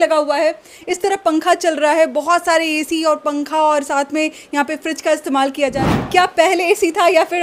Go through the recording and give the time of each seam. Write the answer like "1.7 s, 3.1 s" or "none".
5.8 s